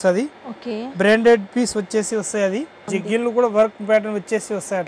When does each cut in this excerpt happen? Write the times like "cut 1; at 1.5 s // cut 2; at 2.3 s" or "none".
cut 1; at 2.9 s